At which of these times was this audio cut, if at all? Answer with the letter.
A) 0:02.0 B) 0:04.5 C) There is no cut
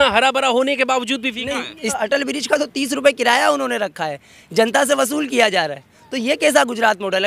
A